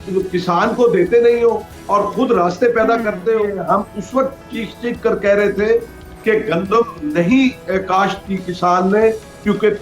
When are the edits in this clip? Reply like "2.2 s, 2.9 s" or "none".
3.5 s